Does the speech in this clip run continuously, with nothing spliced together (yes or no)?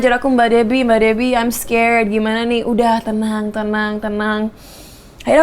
yes